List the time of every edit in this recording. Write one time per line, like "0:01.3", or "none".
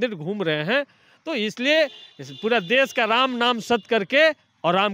none